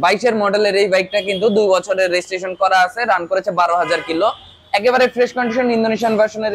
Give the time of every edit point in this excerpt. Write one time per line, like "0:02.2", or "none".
none